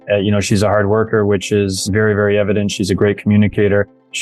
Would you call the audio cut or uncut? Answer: cut